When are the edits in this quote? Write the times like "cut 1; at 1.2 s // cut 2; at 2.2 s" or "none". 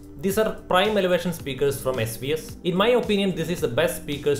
cut 1; at 2.5 s